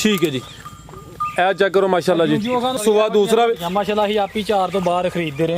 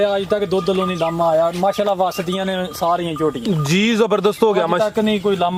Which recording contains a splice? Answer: first; 1 cut; at 2.8 s

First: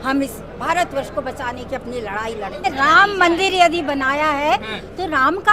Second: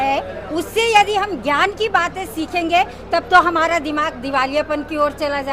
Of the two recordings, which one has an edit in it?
first; 1 cut; at 2.6 s

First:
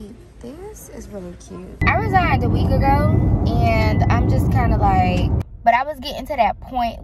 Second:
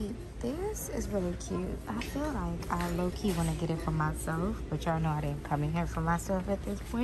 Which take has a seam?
first; 2 cuts; at 1.8 s, 5.4 s

